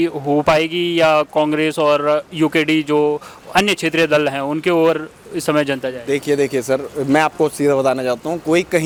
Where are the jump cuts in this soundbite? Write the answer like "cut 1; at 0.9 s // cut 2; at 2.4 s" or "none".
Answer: none